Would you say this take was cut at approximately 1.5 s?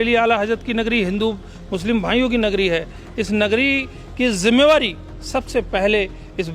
no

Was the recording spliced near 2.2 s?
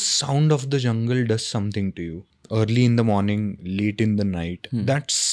yes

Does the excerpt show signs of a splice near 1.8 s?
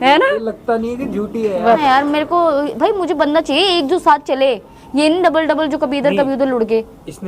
yes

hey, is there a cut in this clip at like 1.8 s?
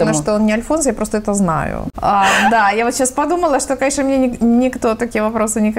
yes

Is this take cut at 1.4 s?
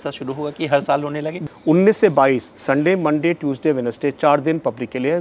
yes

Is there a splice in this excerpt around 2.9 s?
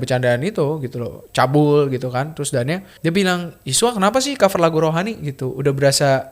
yes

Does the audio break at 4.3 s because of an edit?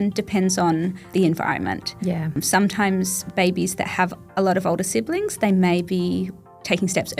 no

